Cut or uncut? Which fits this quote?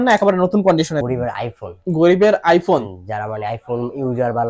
cut